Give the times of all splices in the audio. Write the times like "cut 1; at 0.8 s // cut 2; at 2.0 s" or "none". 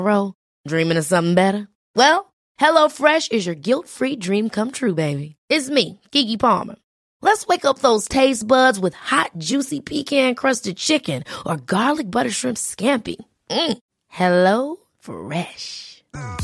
none